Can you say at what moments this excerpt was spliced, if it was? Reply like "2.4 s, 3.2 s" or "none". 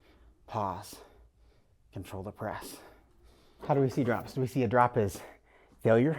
3.6 s